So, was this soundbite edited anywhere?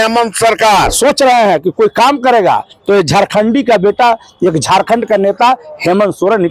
yes; 1 cut; at 0.9 s

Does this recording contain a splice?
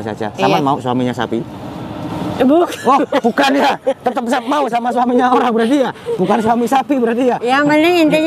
no; 0 cuts

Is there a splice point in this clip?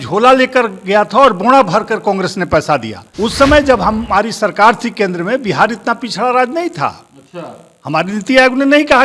yes; 1 cut; at 3.0 s

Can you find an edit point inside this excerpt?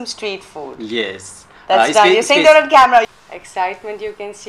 yes; 1 cut; at 3.1 s

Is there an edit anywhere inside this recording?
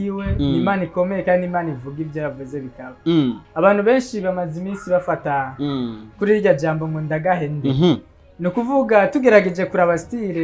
no; 0 cuts

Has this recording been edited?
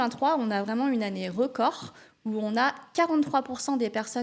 no; 0 cuts

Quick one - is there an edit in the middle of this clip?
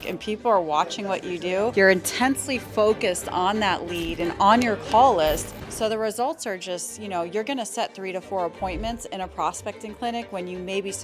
no; 0 cuts

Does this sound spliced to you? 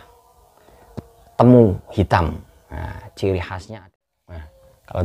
yes; 1 cut; at 3.6 s

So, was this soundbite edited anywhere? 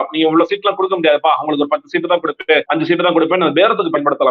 yes; 1 cut; at 2.7 s

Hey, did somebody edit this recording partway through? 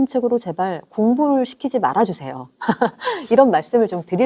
no; 0 cuts

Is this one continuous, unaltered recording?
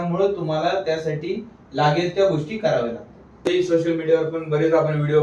no; 1 cut; at 3.4 s

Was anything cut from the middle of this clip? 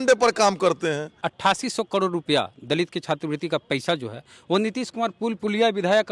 yes; 1 cut; at 1.3 s

